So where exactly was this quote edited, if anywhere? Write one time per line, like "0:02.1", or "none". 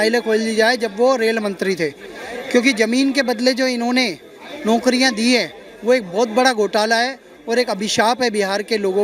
none